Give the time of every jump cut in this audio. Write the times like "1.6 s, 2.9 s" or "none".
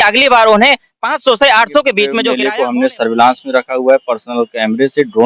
2.3 s